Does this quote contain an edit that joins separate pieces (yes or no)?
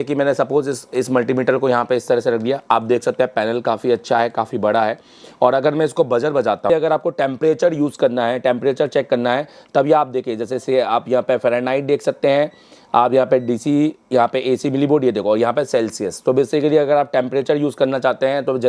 yes